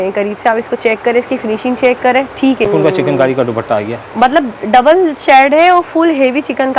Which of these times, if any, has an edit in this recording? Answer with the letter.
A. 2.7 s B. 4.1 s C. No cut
A